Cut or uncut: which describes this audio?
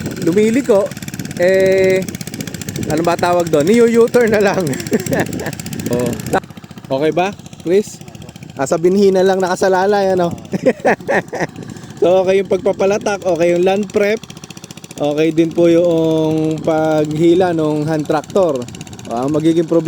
cut